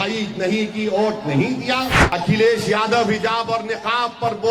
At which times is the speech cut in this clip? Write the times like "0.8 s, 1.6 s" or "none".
2.0 s